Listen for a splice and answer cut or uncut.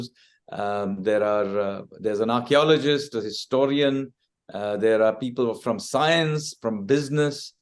uncut